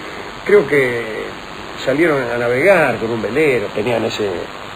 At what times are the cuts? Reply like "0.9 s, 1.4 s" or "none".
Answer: 3.2 s